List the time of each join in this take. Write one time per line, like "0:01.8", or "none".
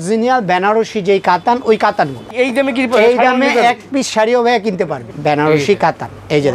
0:02.3
0:05.1